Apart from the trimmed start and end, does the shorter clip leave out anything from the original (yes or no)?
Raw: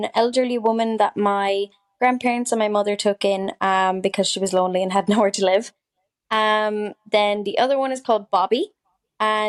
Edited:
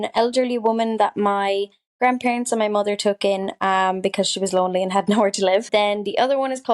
yes